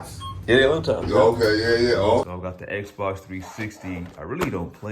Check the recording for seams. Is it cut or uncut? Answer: cut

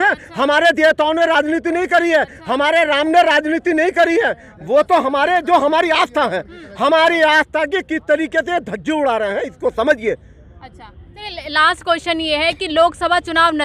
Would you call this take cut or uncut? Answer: uncut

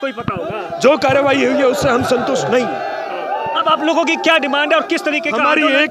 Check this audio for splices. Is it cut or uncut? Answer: uncut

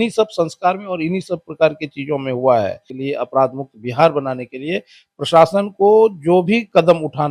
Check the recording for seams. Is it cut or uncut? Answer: cut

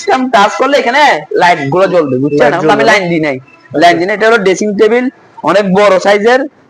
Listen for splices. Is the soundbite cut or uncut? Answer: uncut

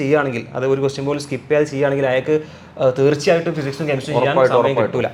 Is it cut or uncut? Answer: uncut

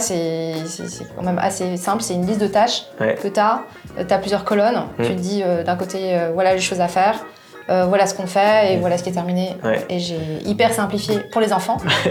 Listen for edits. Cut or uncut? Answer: uncut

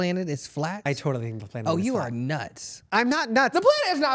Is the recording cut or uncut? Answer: uncut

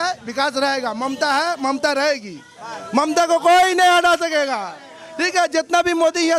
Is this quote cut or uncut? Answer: uncut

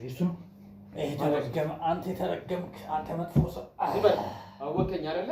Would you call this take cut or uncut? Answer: uncut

